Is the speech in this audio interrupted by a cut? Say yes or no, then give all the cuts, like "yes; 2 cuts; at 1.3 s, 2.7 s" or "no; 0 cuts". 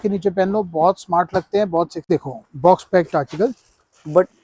yes; 1 cut; at 2.1 s